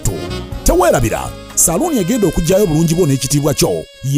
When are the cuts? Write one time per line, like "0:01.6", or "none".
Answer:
none